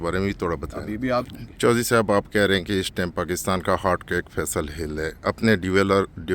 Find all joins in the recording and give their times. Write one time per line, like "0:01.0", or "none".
0:01.3